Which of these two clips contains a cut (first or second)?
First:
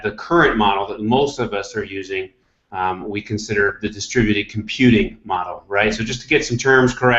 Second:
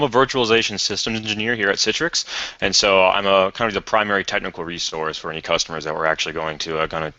first